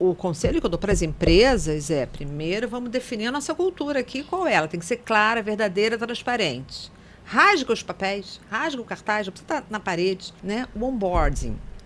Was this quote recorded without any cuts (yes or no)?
no